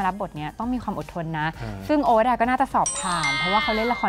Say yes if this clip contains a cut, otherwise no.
no